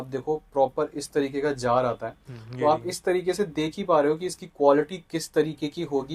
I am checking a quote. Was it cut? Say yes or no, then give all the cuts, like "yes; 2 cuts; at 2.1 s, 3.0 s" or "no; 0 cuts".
no; 0 cuts